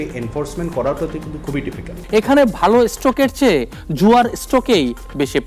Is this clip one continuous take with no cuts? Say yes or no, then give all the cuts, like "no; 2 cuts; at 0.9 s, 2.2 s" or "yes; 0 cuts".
no; 1 cut; at 2.0 s